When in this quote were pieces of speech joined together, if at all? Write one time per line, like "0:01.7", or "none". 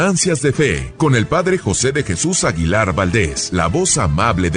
0:00.8
0:03.4